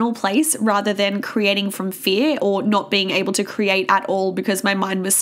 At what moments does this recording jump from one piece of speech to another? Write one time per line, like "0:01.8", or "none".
none